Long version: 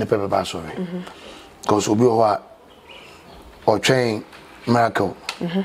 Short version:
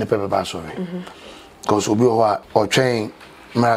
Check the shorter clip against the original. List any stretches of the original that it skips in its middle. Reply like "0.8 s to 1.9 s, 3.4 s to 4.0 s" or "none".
2.4 s to 3.6 s